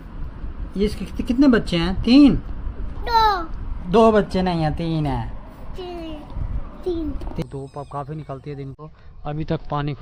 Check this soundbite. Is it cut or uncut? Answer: cut